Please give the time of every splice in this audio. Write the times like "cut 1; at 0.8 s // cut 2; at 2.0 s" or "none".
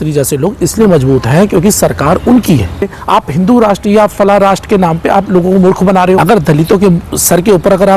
cut 1; at 2.9 s // cut 2; at 6.2 s